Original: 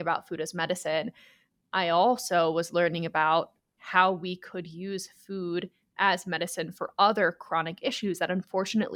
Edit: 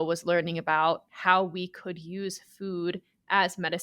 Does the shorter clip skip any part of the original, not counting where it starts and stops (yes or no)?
yes